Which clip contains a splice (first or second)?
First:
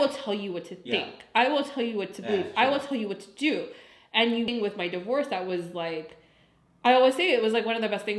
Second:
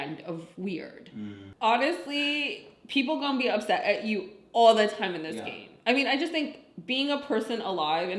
second